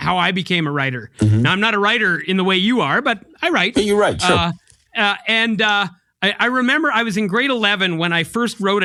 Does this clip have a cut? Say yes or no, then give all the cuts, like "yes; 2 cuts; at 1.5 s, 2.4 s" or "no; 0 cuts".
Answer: no; 0 cuts